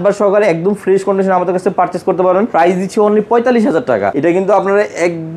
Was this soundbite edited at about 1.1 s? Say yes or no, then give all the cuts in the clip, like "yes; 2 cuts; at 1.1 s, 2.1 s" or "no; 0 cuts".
no; 2 cuts; at 2.5 s, 4.1 s